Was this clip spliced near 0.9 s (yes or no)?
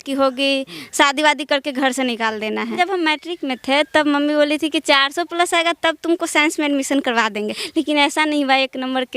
no